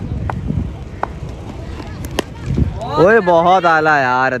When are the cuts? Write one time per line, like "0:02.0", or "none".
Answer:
none

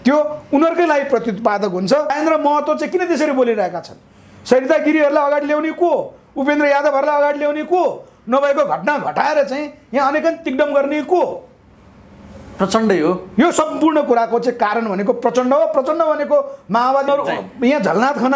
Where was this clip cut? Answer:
0:02.1
0:17.1

